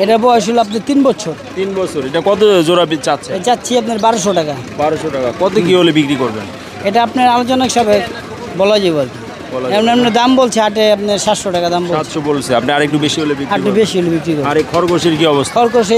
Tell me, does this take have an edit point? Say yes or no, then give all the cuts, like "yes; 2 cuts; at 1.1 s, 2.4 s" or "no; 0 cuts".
no; 0 cuts